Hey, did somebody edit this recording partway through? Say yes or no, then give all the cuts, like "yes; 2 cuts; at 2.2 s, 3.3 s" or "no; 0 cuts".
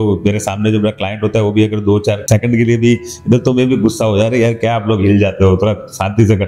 no; 0 cuts